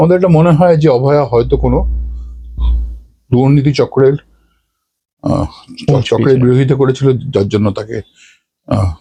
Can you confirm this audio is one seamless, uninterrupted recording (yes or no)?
yes